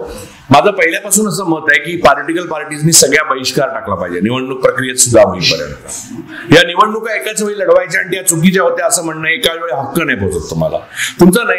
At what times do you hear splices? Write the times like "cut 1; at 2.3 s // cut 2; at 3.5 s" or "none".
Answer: none